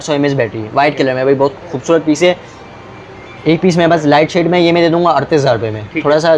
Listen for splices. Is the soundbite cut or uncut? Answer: uncut